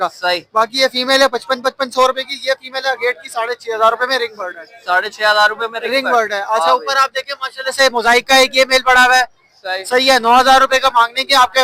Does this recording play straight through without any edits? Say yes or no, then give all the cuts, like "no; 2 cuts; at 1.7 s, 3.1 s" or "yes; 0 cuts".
yes; 0 cuts